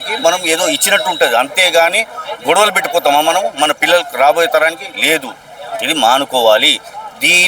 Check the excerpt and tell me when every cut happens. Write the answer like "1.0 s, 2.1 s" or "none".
none